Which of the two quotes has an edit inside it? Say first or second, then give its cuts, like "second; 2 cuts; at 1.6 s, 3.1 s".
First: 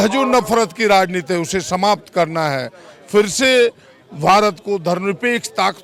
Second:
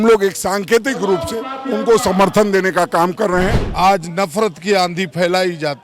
second; 1 cut; at 3.6 s